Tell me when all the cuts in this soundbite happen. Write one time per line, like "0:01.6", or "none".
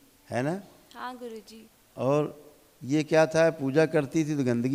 none

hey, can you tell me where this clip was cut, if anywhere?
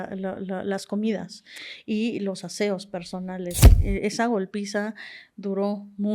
0:03.6

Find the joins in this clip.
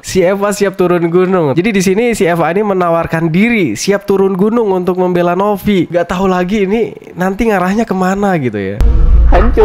0:01.5
0:08.7

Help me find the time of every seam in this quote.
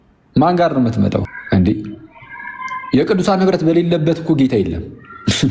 0:01.4

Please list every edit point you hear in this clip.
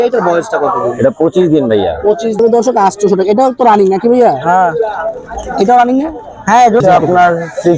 0:02.4
0:06.8

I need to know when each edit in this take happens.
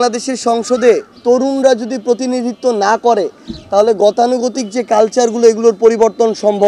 none

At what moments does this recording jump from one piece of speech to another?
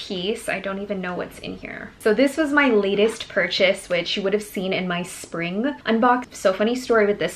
0:01.9
0:06.0

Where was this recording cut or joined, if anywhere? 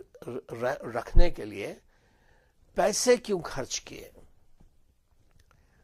none

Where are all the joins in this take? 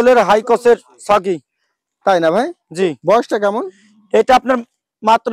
none

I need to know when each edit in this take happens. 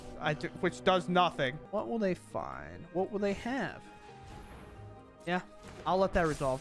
0:01.6

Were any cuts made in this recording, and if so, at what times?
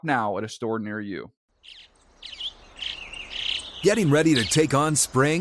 0:01.4

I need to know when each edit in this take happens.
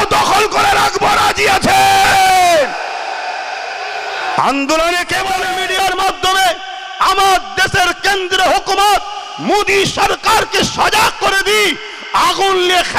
0:05.5

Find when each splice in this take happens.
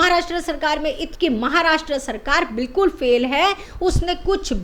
0:01.1

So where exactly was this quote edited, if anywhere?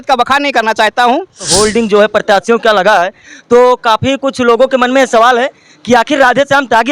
0:01.5

